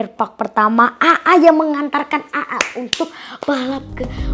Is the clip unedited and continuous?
yes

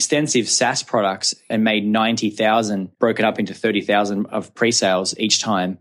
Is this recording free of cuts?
no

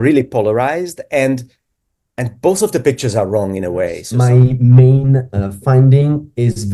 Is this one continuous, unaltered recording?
no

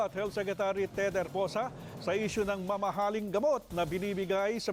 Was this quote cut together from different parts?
no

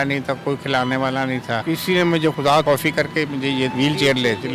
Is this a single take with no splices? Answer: no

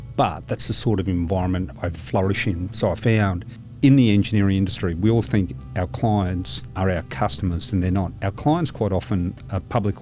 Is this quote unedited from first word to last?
no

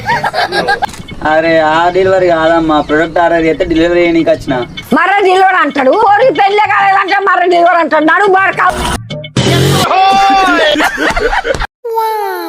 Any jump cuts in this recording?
yes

